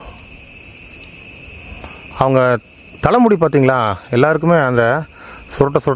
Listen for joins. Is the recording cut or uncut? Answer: uncut